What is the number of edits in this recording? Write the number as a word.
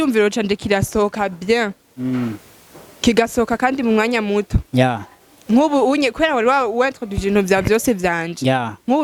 zero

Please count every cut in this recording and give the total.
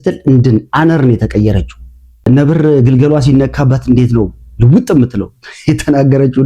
one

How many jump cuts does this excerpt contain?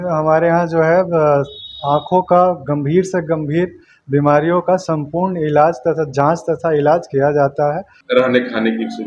one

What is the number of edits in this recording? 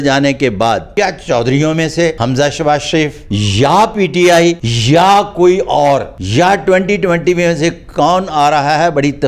five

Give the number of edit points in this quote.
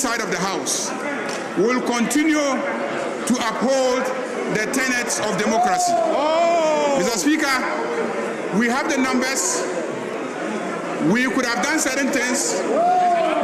zero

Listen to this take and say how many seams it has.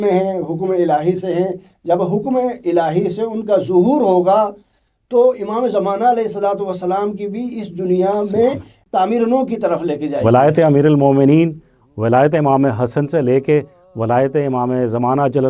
two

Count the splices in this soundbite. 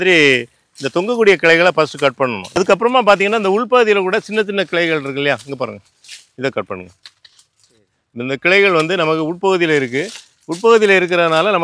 one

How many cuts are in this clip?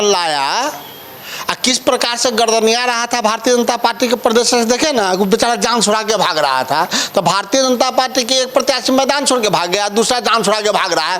zero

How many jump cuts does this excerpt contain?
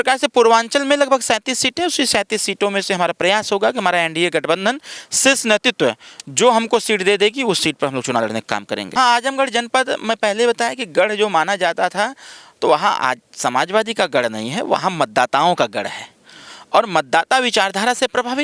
one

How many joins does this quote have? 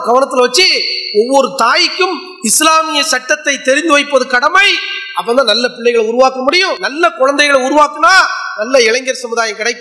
one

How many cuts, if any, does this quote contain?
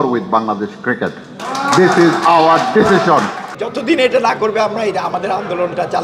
one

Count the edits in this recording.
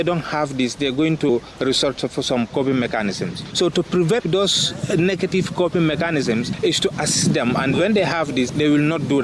two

